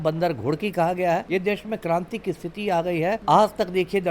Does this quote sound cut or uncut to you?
cut